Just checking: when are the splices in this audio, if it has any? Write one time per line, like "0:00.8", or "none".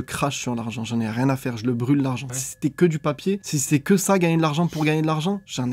0:02.4
0:03.5